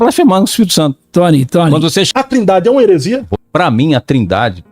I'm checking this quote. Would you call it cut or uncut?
cut